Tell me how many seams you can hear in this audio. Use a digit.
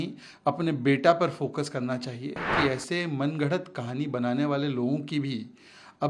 1